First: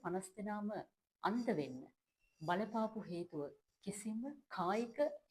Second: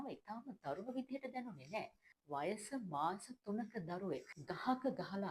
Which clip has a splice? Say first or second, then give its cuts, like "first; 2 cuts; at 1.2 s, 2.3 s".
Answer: second; 2 cuts; at 2.1 s, 4.3 s